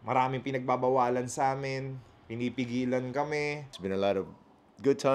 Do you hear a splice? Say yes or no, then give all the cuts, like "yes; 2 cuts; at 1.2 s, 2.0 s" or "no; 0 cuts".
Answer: yes; 1 cut; at 3.6 s